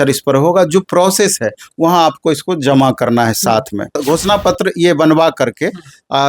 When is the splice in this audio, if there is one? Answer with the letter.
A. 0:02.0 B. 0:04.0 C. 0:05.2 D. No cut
B